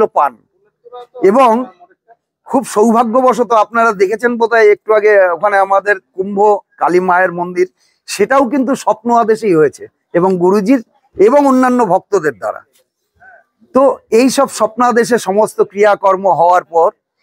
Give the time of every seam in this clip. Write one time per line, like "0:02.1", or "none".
none